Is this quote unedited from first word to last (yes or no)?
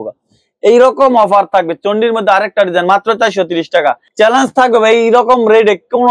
no